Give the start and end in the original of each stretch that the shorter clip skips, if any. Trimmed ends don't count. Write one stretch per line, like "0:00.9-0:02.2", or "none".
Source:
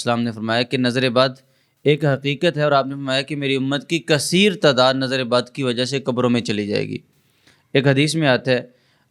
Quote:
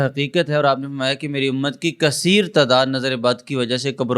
none